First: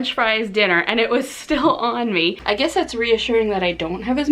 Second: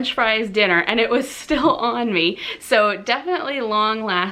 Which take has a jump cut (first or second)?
first